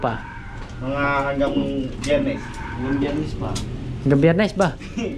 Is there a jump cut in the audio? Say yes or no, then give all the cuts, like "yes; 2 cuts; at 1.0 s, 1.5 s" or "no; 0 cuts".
no; 0 cuts